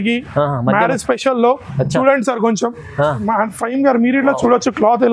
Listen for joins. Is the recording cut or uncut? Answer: cut